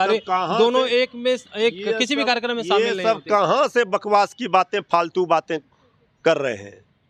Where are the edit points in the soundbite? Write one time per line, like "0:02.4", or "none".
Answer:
none

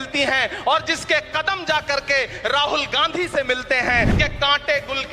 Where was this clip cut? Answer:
0:04.1

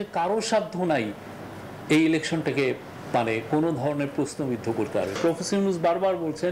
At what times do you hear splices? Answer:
0:05.2

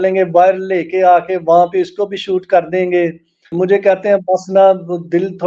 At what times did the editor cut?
0:03.5

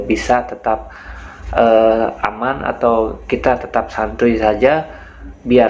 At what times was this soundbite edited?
none

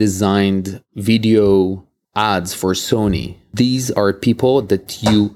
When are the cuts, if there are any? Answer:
0:03.4

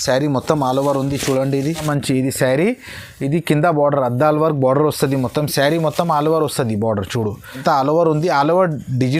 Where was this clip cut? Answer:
0:01.8
0:07.6

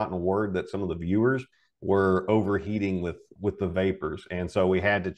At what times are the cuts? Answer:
0:03.2

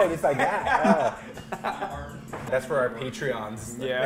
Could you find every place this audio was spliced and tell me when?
0:02.5

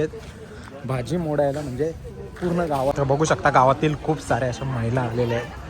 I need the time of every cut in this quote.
0:02.9

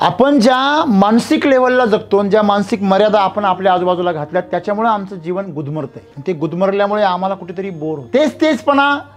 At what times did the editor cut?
0:06.0
0:08.0

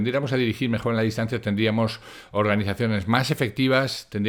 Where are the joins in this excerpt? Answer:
none

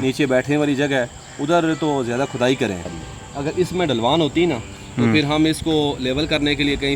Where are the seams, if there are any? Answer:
0:02.9

